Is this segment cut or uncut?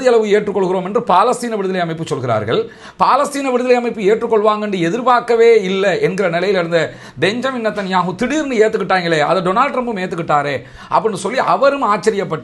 uncut